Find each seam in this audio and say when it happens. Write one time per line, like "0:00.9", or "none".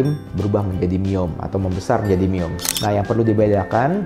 0:02.6